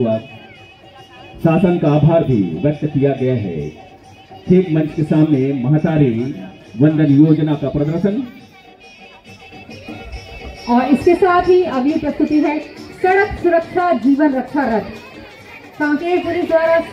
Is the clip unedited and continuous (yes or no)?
yes